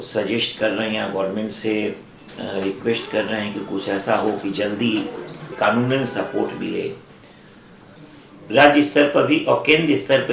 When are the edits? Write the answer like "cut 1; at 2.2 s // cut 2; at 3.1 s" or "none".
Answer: cut 1; at 5.5 s // cut 2; at 7.8 s